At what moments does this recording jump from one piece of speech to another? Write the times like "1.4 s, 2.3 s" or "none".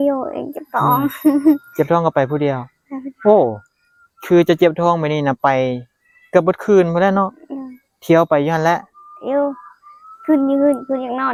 none